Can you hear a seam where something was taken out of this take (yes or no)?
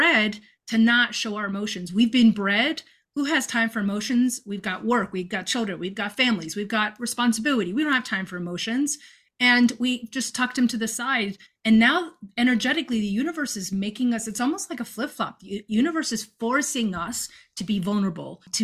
no